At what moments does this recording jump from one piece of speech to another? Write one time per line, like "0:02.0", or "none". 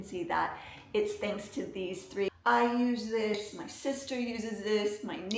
0:02.3